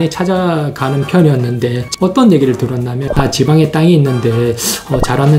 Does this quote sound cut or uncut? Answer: cut